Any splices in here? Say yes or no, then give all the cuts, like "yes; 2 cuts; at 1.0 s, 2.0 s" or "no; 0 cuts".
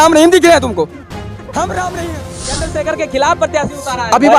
yes; 1 cut; at 2.2 s